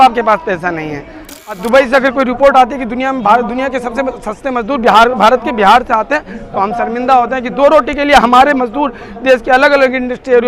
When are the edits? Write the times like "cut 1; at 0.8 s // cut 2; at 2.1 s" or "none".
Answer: cut 1; at 1.3 s